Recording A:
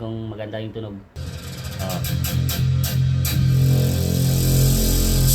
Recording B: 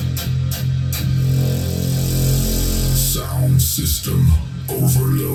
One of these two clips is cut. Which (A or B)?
A